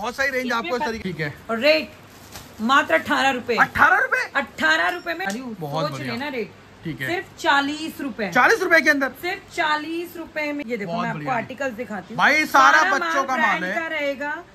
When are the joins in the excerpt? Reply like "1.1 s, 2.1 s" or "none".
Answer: 1.0 s, 5.3 s, 10.6 s